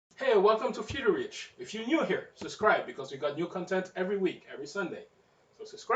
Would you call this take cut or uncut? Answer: cut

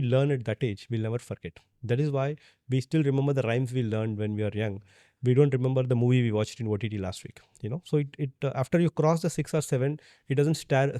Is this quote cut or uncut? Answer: uncut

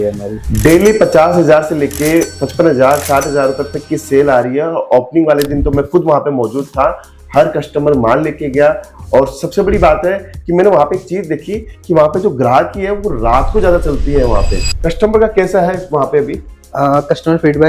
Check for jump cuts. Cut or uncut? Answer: cut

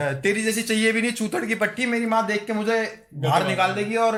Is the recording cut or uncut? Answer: uncut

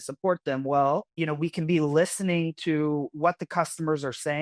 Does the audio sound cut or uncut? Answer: cut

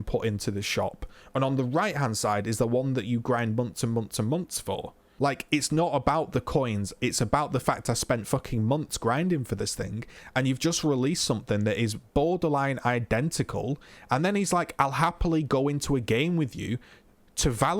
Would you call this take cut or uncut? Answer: cut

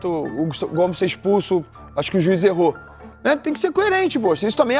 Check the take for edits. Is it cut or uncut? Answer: uncut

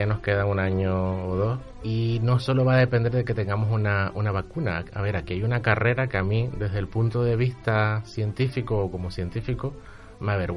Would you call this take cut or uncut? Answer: cut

